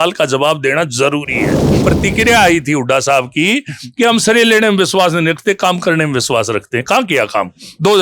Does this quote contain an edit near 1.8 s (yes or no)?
yes